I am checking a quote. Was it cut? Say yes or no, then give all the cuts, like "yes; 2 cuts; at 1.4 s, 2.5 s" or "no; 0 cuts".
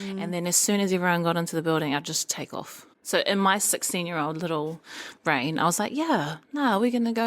yes; 1 cut; at 2.9 s